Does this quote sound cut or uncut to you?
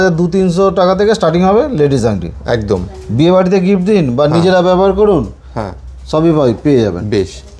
uncut